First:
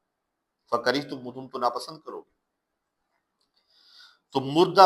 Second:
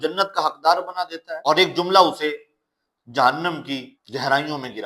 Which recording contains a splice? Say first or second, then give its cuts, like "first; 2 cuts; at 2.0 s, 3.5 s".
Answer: second; 2 cuts; at 1.3 s, 4.0 s